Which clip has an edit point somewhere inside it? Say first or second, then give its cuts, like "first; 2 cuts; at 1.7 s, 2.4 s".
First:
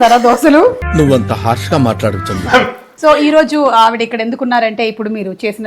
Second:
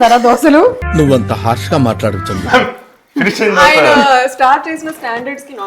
first; 1 cut; at 2.8 s